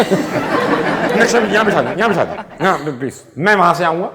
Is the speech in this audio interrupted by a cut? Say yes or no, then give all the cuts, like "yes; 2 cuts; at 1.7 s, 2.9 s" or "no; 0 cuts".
yes; 1 cut; at 1.1 s